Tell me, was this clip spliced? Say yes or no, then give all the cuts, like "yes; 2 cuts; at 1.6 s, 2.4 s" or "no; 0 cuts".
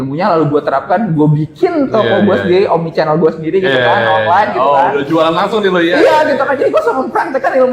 no; 0 cuts